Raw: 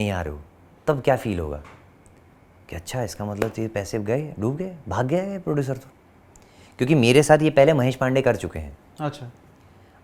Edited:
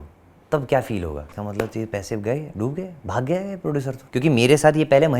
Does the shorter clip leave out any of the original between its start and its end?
yes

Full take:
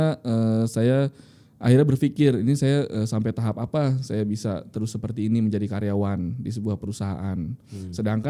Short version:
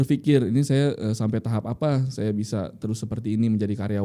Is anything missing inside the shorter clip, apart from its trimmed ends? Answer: no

